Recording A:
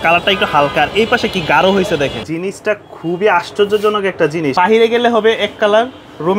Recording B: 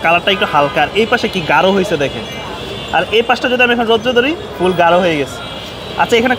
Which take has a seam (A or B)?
A